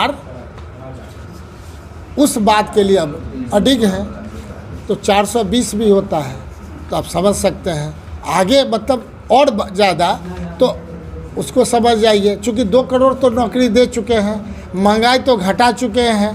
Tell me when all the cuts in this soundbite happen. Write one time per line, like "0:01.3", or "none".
none